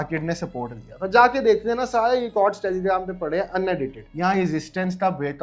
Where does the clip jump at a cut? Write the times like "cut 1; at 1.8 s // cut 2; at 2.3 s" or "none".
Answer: cut 1; at 4.0 s